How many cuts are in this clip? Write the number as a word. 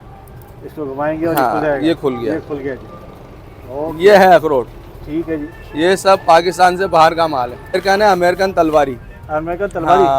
one